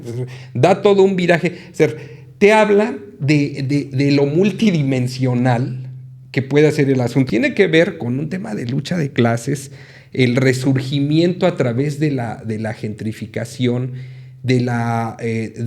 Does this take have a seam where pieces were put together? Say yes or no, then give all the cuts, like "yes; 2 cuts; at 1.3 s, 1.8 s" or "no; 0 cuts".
yes; 1 cut; at 7.3 s